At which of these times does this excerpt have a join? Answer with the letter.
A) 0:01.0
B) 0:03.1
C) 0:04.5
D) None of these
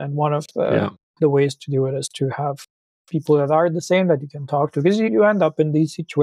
D